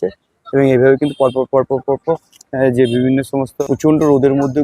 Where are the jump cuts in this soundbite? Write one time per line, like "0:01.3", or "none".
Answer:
0:03.5